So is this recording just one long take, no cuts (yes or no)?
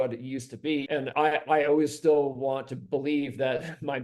no